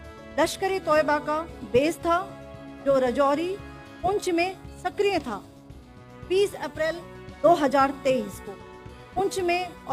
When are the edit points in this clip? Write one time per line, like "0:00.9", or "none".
none